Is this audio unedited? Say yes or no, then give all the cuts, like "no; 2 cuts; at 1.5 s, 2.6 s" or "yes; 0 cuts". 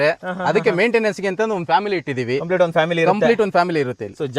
yes; 0 cuts